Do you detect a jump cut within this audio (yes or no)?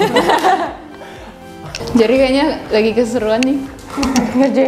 yes